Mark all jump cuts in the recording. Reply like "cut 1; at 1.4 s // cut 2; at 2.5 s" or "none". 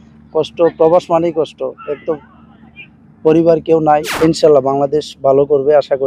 cut 1; at 4.1 s